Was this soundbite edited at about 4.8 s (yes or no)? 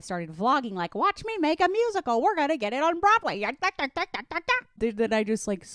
yes